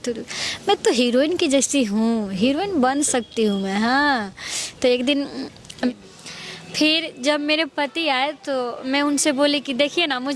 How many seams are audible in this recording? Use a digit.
1